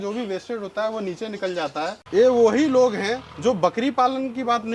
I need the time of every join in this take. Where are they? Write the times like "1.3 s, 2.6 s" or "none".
1.9 s